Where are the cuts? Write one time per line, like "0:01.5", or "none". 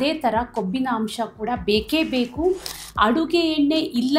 0:02.7

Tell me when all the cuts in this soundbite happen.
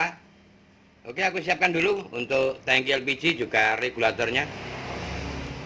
0:04.1

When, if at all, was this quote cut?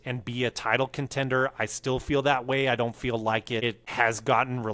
0:03.8

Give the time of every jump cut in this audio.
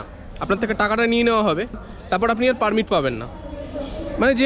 0:01.8

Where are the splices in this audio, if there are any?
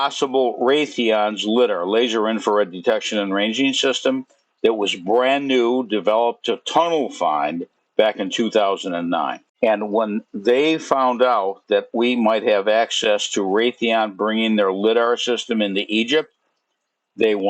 0:09.4

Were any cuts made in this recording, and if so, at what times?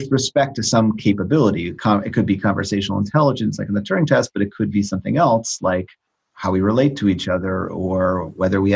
none

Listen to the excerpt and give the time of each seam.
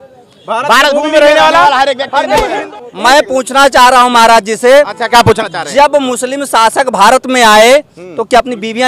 0:02.6

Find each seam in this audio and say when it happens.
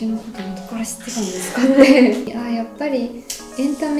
0:02.4

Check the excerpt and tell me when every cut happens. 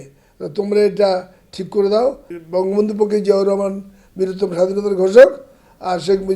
0:02.3

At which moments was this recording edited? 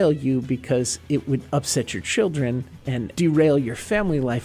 0:03.1

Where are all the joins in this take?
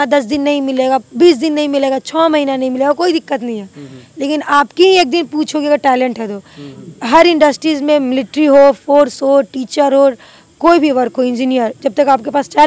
none

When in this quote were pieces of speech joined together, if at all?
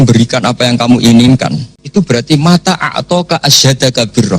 0:01.7

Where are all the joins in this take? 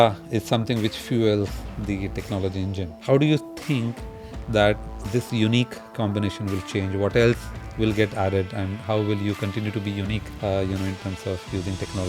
0:02.9
0:10.3

